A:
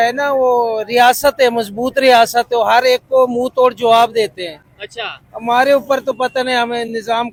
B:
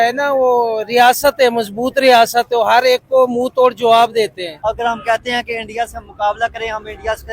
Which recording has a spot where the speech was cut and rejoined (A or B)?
B